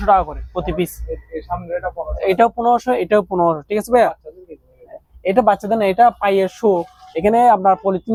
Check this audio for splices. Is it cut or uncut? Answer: uncut